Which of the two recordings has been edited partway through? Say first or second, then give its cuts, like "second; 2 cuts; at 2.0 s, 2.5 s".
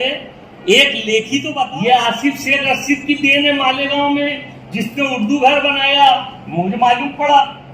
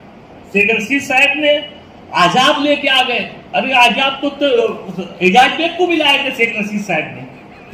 first; 1 cut; at 1.6 s